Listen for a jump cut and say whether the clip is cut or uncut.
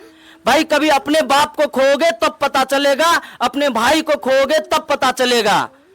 uncut